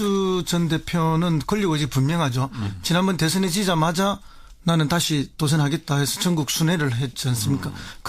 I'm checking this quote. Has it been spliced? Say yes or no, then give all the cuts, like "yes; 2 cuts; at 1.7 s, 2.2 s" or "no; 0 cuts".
yes; 1 cut; at 4.7 s